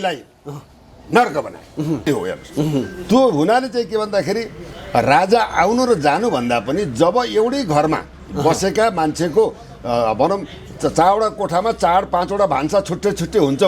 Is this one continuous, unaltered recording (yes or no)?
no